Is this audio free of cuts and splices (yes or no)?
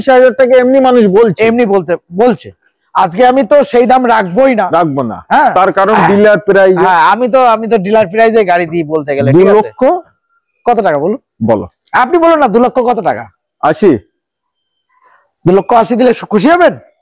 yes